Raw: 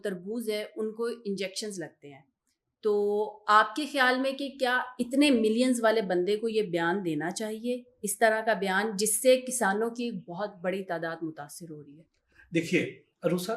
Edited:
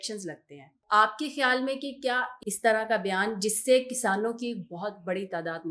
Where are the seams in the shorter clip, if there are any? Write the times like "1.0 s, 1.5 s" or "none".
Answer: 0.8 s, 2.3 s